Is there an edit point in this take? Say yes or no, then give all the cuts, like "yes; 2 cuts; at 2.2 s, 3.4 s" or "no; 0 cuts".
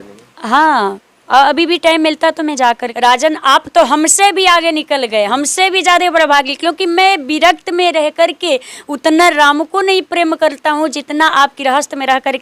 yes; 1 cut; at 2.9 s